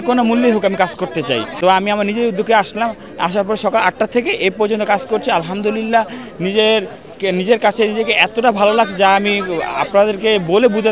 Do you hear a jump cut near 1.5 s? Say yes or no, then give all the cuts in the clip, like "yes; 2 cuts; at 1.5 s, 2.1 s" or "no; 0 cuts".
yes; 1 cut; at 1.5 s